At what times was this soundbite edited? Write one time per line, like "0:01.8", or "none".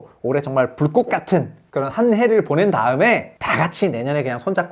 0:01.6
0:03.3

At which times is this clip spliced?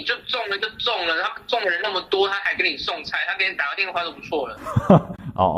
none

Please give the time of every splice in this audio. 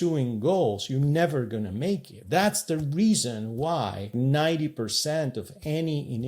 0:02.1
0:04.1

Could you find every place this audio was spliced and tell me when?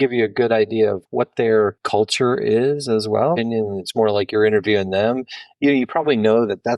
0:01.0
0:01.8
0:03.4

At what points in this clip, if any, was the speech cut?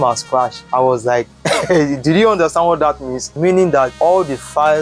0:03.3

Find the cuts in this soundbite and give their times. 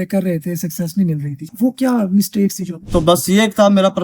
0:01.4
0:02.9

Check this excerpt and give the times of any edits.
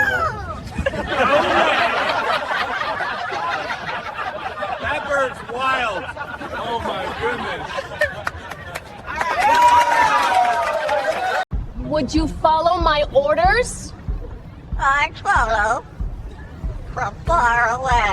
0:11.6

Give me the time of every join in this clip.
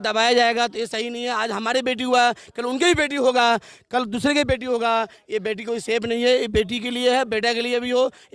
none

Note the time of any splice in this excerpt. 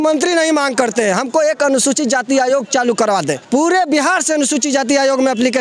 0:03.4

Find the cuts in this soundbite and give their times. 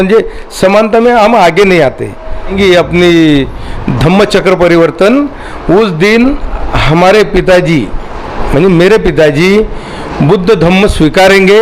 0:02.5

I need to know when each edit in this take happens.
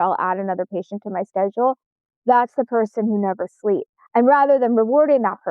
0:04.0

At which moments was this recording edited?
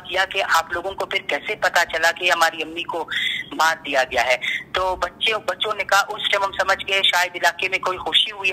none

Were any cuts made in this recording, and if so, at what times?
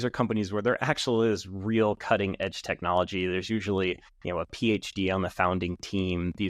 0:04.1

